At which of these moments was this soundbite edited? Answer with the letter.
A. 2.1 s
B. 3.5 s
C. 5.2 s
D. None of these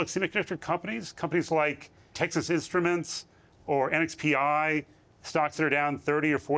A